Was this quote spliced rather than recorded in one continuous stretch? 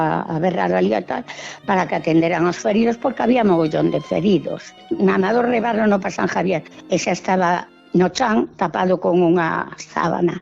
yes; 3 cuts; at 4.6 s, 6.7 s, 7.7 s

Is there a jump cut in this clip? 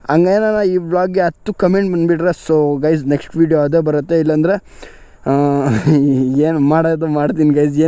no; 0 cuts

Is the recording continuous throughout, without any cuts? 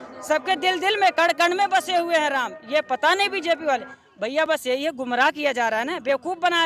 yes; 0 cuts

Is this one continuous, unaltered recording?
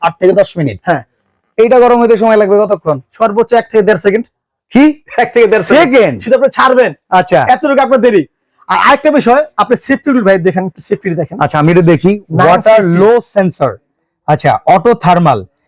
yes; 0 cuts

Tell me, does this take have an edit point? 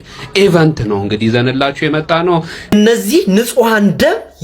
yes; 1 cut; at 2.5 s

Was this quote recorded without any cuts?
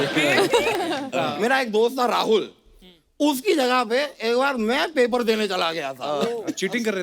no; 1 cut; at 1.1 s

